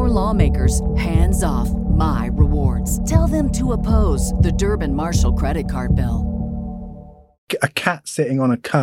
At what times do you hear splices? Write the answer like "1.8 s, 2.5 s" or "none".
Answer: 7.5 s